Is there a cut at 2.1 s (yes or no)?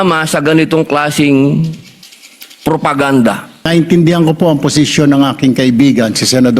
no